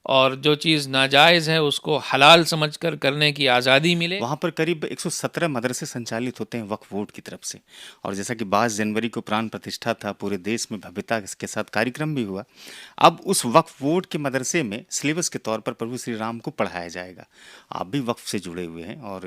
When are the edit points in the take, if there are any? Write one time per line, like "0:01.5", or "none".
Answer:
0:04.0